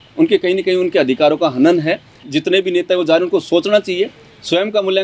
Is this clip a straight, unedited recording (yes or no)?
no